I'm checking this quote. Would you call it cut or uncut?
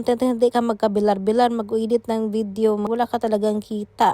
cut